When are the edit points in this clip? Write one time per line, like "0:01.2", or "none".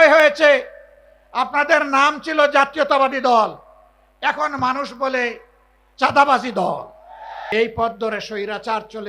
0:07.5